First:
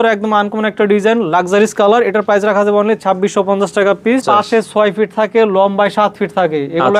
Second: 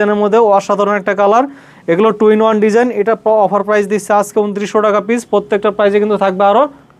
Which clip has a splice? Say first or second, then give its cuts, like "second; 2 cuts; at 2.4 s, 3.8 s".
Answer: first; 1 cut; at 4.2 s